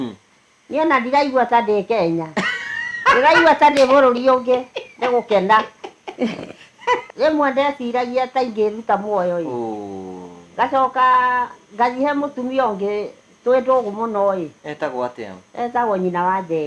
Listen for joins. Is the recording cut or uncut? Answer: cut